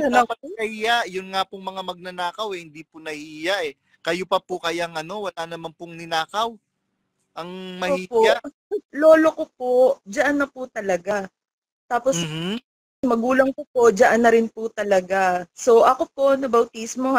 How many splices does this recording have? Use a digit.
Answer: 2